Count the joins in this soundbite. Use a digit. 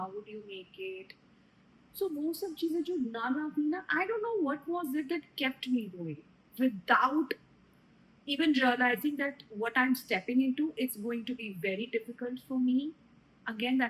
0